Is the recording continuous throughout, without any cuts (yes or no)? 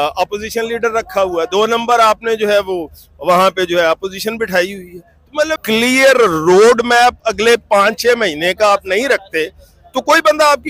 no